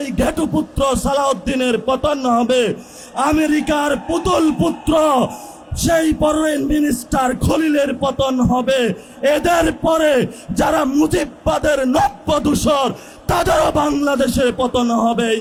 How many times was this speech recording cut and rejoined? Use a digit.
0